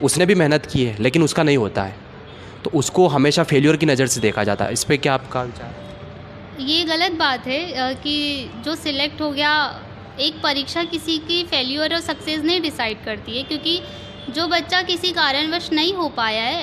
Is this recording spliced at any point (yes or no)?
no